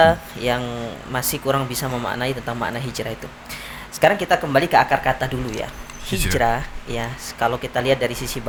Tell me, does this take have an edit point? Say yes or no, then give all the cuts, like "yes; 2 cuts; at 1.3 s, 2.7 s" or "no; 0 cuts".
no; 0 cuts